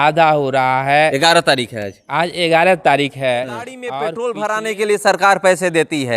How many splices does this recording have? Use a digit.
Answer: 1